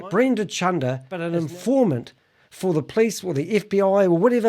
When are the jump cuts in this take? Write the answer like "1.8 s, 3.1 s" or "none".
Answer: 1.2 s